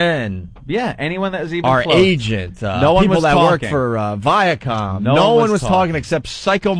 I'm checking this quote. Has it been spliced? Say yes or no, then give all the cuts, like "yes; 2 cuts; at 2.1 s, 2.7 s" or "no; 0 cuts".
yes; 1 cut; at 1.9 s